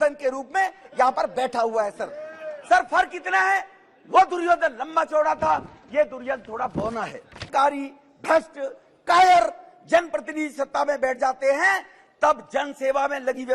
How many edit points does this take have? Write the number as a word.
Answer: one